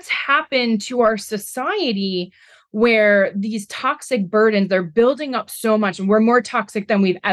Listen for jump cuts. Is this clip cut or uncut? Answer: uncut